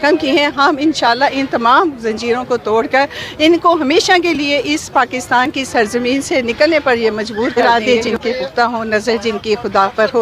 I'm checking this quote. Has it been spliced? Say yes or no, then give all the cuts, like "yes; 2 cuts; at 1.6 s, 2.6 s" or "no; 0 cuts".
yes; 1 cut; at 7.6 s